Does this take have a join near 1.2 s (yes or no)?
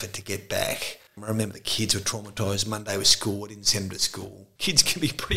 yes